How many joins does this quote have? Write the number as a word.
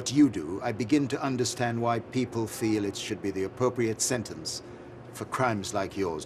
zero